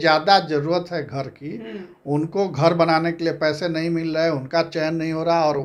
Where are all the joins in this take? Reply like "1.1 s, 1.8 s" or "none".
none

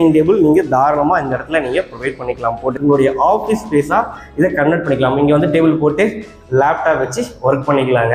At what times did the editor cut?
2.8 s

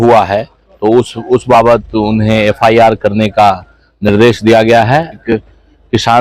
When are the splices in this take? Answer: 5.2 s

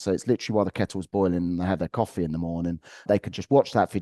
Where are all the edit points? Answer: 3.1 s

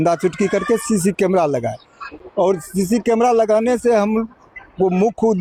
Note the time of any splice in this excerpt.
none

